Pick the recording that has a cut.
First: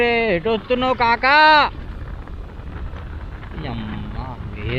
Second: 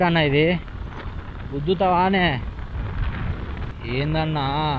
second; 1 cut; at 3.7 s

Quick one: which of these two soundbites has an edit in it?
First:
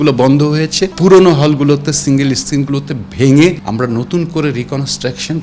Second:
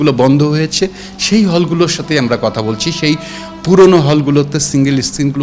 first; 2 cuts; at 0.9 s, 3.6 s

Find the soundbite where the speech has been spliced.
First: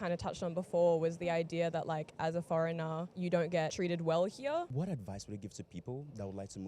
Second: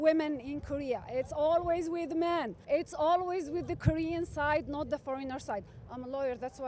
first; 1 cut; at 4.7 s

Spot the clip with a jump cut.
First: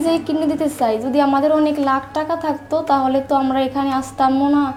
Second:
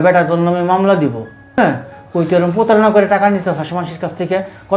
second; 1 cut; at 1.6 s

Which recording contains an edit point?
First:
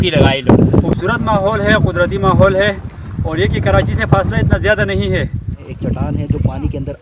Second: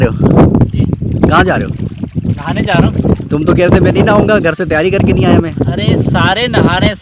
first; 2 cuts; at 0.9 s, 5.6 s

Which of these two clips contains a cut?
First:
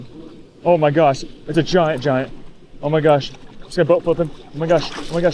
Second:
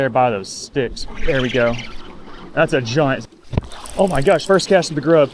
second; 1 cut; at 3.2 s

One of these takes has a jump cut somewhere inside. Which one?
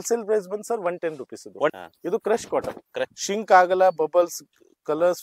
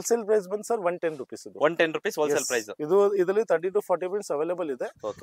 first; 2 cuts; at 1.7 s, 3.1 s

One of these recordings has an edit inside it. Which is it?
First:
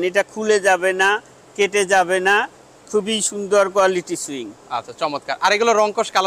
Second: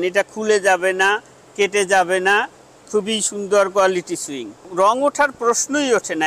second; 1 cut; at 4.7 s

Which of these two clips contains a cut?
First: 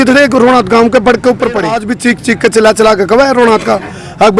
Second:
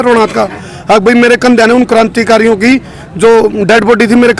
first; 1 cut; at 1.8 s

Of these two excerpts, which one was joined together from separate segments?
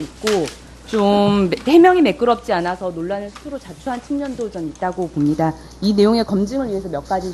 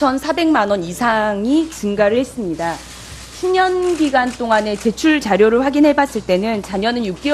first; 1 cut; at 2.0 s

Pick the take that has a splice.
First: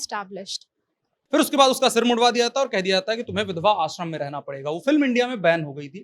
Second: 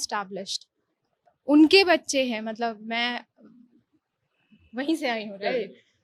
first; 1 cut; at 1.1 s

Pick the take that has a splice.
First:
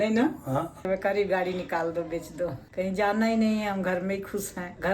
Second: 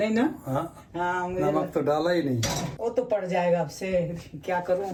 first; 2 cuts; at 0.9 s, 2.6 s

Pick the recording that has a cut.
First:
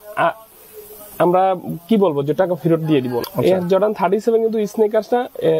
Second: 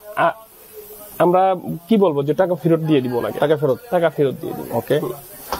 first; 1 cut; at 3.2 s

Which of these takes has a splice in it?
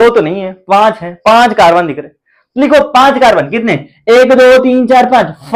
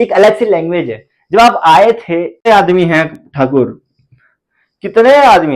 second; 1 cut; at 2.5 s

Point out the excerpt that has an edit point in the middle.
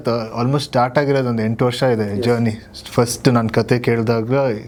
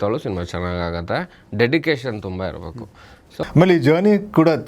second; 1 cut; at 3.3 s

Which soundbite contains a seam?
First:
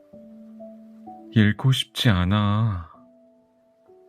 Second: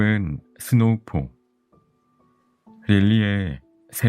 first; 2 cuts; at 1.0 s, 3.2 s

